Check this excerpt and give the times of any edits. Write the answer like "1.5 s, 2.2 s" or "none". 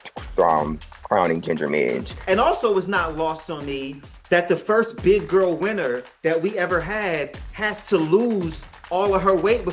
2.1 s